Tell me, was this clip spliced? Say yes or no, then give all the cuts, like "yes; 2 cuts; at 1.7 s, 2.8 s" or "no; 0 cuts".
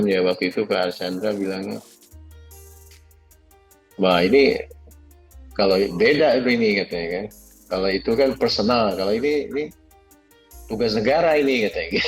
no; 0 cuts